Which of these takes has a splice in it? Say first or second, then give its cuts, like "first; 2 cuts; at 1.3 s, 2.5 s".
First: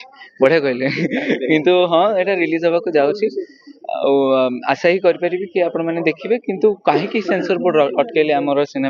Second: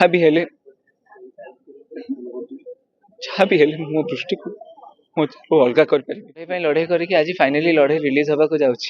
second; 1 cut; at 6.5 s